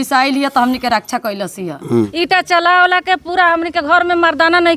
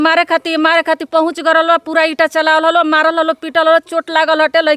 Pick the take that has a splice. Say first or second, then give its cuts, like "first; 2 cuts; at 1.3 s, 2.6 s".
first; 1 cut; at 2.1 s